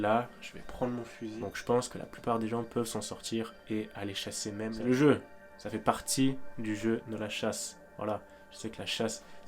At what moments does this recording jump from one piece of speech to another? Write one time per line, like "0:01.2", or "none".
0:01.2
0:04.7